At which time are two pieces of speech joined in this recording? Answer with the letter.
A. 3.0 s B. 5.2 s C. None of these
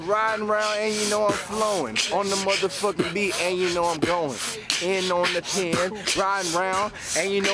C